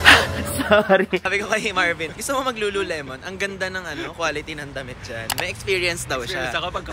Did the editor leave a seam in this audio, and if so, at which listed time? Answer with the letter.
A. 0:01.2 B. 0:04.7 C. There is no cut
A